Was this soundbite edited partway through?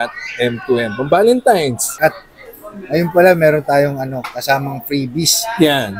yes; 1 cut; at 1.8 s

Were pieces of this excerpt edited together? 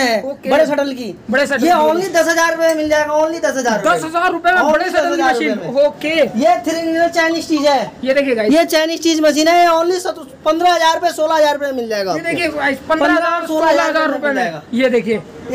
no; 0 cuts

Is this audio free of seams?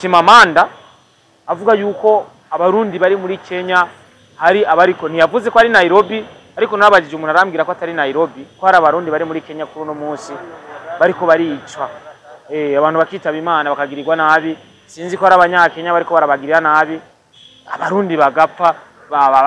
yes; 0 cuts

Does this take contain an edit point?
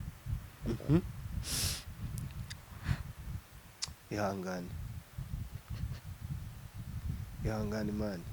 no; 0 cuts

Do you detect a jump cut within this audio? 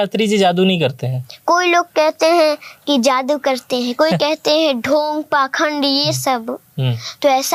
no; 0 cuts

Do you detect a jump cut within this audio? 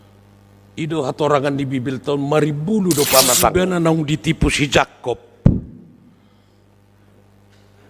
yes; 1 cut; at 3.5 s

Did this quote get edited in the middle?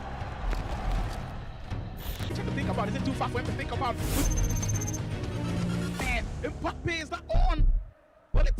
yes; 1 cut; at 2.3 s

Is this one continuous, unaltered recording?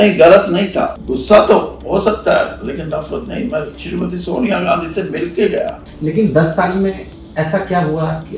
no; 2 cuts; at 0.9 s, 5.9 s

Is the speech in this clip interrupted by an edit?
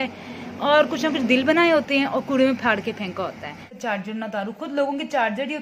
yes; 1 cut; at 3.7 s

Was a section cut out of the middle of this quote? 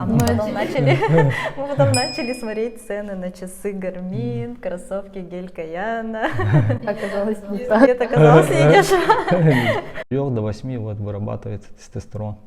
yes; 1 cut; at 10.0 s

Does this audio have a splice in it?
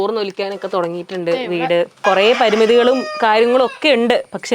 yes; 1 cut; at 2.0 s

